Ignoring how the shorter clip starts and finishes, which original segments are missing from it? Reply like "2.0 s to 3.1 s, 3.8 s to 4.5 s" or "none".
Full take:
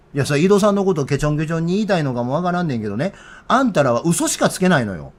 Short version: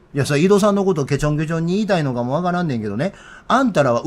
none

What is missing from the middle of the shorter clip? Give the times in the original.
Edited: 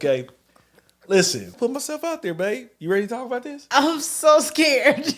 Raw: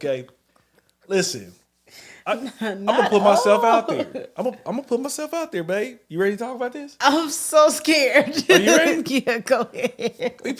1.5 s to 4.8 s

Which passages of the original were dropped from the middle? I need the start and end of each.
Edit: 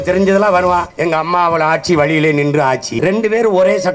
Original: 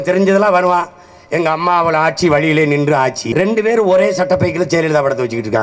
0.9 s to 1.2 s

